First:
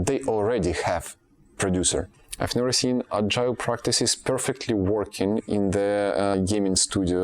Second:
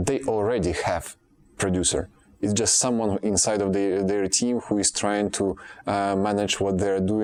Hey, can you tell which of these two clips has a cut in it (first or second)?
first